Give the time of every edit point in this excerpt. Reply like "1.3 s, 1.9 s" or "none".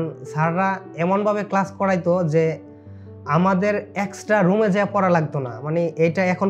none